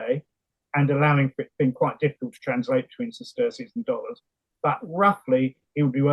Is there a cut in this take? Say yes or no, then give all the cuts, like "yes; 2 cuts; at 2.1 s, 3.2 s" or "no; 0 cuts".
no; 0 cuts